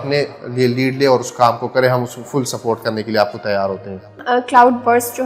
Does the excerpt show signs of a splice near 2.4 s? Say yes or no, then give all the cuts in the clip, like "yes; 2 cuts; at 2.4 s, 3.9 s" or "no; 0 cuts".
no; 1 cut; at 4.2 s